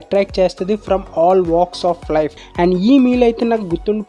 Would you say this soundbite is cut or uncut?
cut